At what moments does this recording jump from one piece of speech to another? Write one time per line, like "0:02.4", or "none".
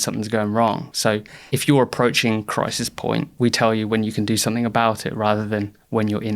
0:01.0
0:03.3